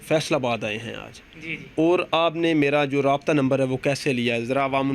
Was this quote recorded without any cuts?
yes; 0 cuts

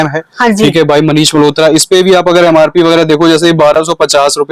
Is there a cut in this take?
no; 0 cuts

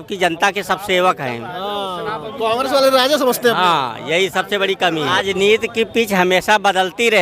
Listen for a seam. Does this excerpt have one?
yes; 1 cut; at 5.1 s

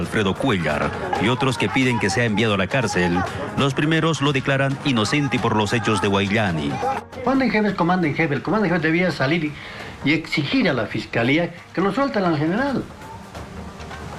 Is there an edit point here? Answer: yes; 1 cut; at 7.0 s

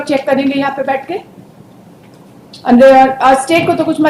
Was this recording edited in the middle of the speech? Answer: no; 0 cuts

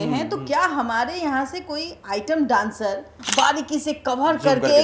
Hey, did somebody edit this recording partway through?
yes; 1 cut; at 3.1 s

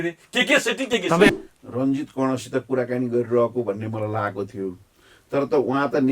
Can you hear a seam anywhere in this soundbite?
yes; 1 cut; at 1.3 s

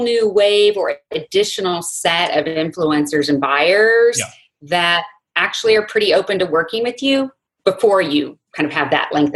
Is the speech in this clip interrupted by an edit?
yes; 2 cuts; at 7.4 s, 8.4 s

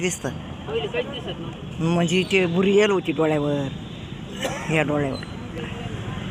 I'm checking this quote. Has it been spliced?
no; 0 cuts

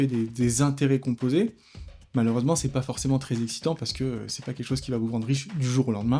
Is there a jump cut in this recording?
no; 0 cuts

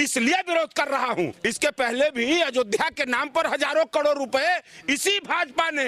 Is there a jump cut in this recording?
yes; 1 cut; at 1.3 s

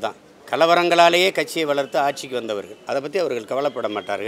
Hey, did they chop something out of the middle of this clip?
no; 0 cuts

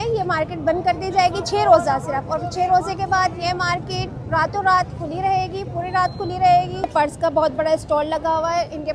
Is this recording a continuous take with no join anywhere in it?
no; 1 cut; at 6.9 s

